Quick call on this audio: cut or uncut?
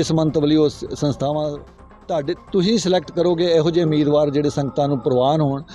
cut